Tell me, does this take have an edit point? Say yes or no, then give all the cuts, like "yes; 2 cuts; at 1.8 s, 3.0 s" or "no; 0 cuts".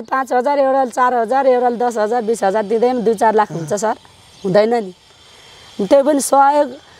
no; 0 cuts